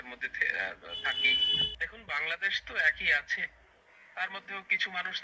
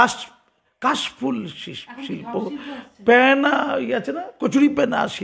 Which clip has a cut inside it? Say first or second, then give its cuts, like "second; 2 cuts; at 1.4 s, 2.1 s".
first; 1 cut; at 1.5 s